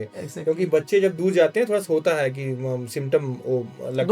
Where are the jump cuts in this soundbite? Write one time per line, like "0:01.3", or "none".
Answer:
none